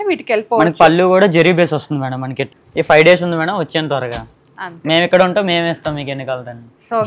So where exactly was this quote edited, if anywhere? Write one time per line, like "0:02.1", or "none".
0:02.4

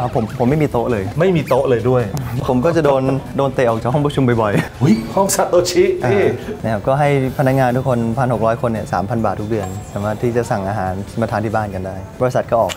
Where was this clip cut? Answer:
0:02.2
0:04.7
0:06.5

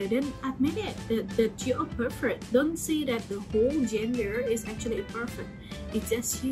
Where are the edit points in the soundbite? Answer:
none

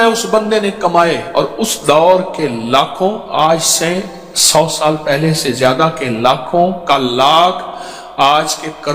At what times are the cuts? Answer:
none

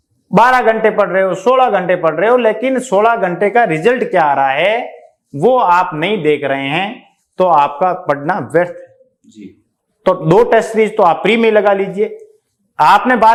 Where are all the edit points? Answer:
none

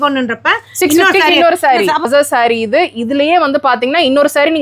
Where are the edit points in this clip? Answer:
0:02.1

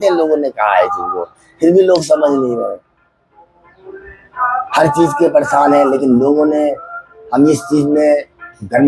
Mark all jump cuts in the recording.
none

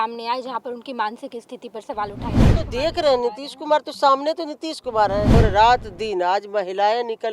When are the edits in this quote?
0:02.5
0:05.3

